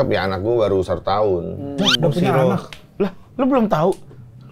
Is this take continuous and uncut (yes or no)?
yes